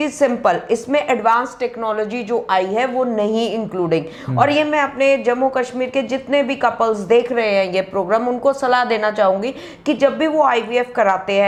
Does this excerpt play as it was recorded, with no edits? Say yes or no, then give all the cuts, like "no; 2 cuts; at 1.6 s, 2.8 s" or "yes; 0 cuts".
yes; 0 cuts